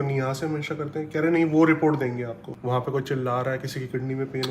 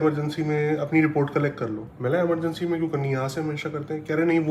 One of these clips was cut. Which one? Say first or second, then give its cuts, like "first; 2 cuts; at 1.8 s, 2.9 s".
first; 1 cut; at 2.5 s